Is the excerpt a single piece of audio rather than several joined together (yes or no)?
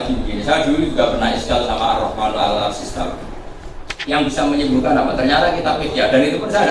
yes